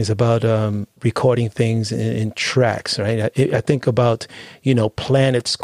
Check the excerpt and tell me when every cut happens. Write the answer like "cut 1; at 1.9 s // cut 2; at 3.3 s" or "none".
none